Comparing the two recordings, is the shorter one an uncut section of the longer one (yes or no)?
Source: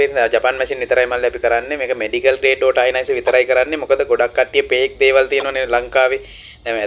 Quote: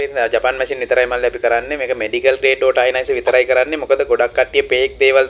yes